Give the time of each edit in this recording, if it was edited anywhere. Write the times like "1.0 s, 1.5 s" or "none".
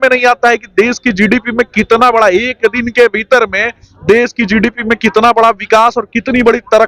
none